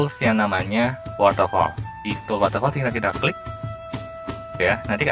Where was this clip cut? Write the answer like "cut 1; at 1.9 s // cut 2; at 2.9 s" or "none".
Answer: none